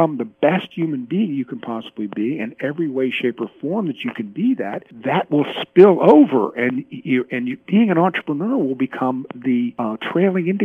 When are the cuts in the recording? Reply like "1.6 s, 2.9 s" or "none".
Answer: 4.9 s, 9.7 s